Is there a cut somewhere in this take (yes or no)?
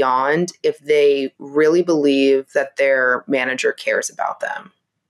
no